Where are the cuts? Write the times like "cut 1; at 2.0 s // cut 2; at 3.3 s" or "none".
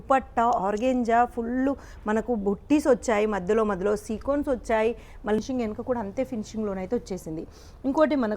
cut 1; at 5.4 s

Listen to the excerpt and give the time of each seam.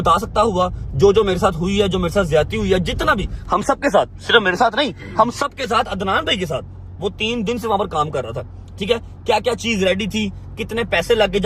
none

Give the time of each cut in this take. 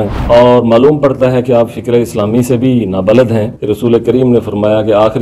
cut 1; at 3.5 s

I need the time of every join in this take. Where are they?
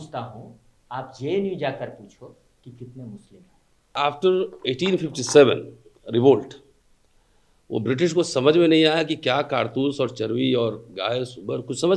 cut 1; at 3.9 s

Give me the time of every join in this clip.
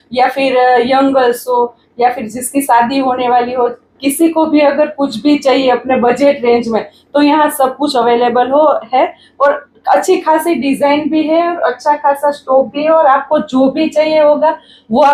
none

